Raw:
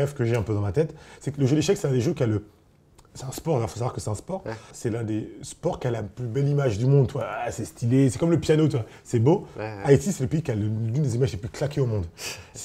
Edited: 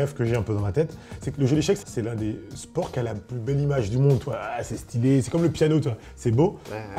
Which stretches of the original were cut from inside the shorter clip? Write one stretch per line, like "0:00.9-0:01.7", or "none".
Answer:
0:01.8-0:04.7